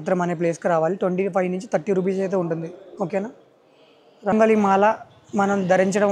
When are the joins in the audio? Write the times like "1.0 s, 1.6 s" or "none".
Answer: 4.3 s